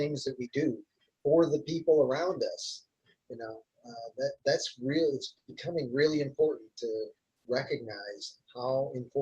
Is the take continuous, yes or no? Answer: yes